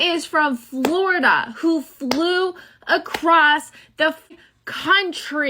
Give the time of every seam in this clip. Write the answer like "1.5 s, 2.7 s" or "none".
4.3 s